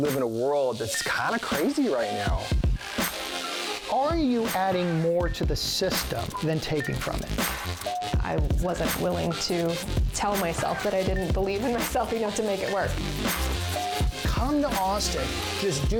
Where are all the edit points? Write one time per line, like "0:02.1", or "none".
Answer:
none